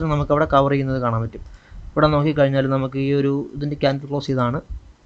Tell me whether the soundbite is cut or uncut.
uncut